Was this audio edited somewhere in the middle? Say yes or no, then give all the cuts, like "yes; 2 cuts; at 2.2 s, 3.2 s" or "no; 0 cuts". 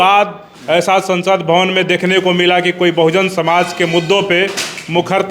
no; 0 cuts